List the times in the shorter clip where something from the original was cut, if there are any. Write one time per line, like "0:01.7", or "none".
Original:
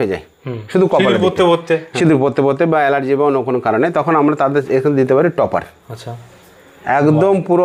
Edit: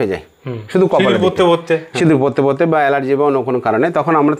none

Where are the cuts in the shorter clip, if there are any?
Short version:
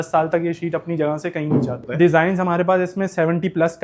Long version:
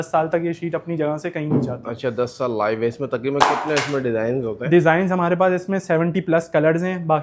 0:01.8

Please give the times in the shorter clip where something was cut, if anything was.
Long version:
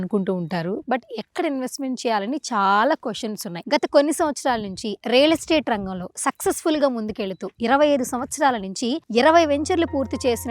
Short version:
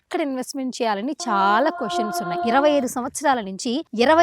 0:02.3

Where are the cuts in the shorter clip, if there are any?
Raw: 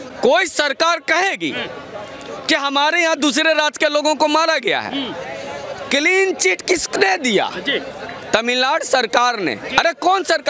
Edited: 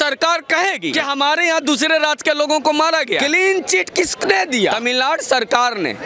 0:00.9
0:03.2
0:04.8

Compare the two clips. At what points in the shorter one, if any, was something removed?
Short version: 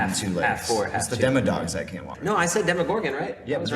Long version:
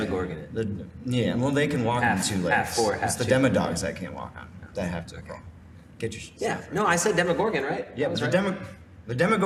0:02.1

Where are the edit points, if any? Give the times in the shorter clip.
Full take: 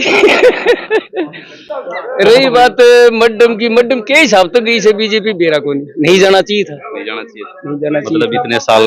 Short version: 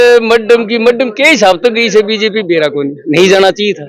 none

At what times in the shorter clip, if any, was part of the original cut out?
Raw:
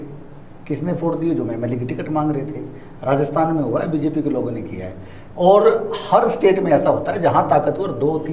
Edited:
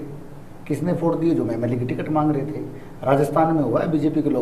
none

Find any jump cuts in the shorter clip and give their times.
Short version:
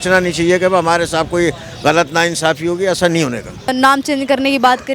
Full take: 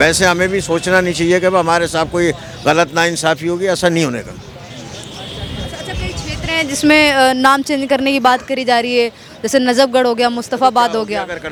0:03.7

